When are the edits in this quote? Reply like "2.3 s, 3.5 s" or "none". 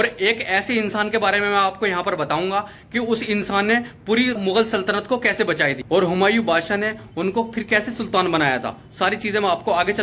none